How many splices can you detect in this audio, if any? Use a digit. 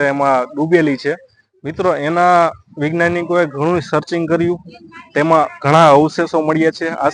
0